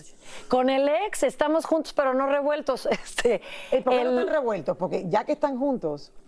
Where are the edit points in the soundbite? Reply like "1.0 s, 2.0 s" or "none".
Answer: none

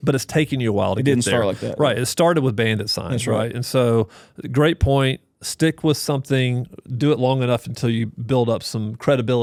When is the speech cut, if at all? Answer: none

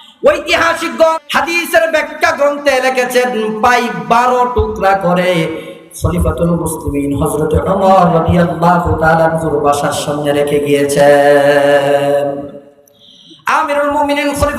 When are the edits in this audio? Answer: 1.2 s

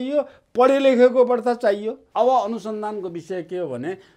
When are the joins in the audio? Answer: 2.0 s

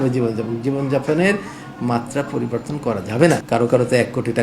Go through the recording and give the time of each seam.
3.4 s

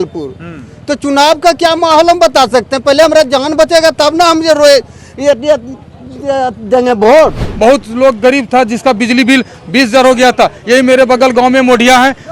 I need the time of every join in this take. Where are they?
7.4 s

